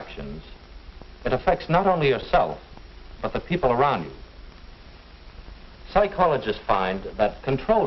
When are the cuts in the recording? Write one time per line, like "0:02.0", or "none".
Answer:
0:05.2